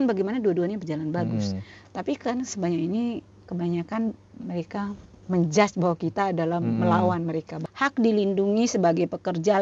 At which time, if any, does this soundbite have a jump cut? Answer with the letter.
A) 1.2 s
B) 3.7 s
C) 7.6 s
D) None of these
C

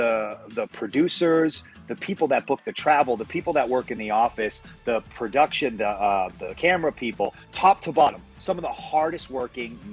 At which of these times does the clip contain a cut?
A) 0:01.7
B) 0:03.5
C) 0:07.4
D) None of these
C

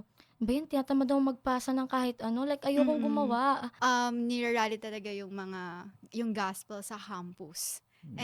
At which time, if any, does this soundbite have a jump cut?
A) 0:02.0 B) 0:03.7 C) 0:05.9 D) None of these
B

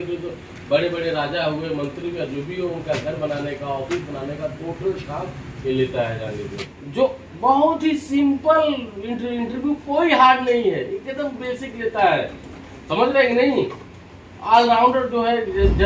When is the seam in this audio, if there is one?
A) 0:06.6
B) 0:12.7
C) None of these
A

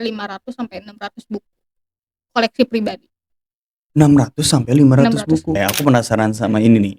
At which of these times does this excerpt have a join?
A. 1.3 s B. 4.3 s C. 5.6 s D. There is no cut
C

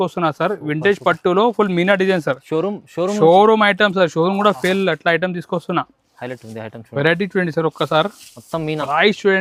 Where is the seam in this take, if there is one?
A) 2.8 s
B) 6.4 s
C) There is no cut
C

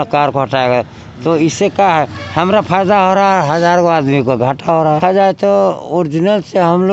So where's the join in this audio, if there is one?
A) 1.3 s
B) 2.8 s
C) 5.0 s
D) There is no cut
C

